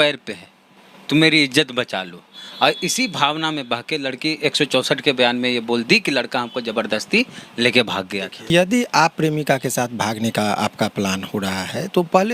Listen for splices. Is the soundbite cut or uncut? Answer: cut